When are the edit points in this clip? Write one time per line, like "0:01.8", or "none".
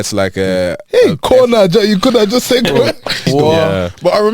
0:03.2